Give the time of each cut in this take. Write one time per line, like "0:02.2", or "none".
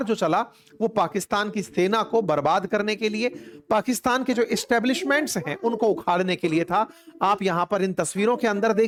none